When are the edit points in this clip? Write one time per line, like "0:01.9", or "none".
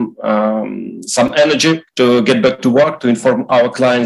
0:01.9